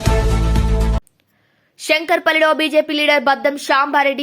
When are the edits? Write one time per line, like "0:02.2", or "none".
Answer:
none